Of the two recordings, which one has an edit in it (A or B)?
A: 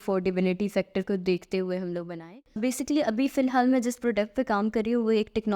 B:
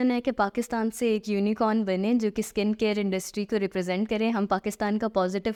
A